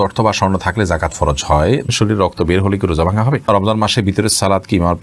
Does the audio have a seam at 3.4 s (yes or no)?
yes